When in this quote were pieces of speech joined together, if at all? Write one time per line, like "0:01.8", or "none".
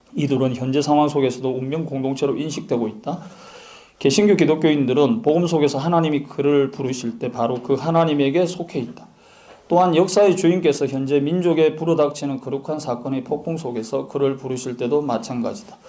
0:01.7